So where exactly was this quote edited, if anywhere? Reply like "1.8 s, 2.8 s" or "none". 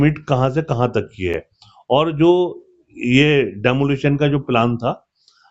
none